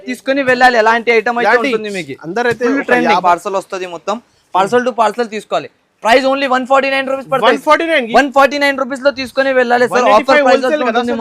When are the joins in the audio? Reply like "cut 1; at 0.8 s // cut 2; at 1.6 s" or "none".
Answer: cut 1; at 3.2 s